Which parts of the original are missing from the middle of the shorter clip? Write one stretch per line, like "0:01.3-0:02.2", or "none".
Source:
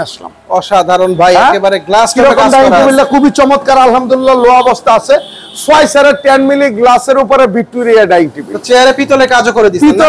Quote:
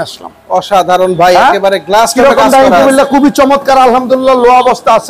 none